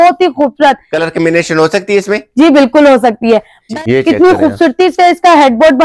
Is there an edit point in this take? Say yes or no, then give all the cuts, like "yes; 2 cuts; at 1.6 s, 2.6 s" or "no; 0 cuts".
yes; 1 cut; at 3.6 s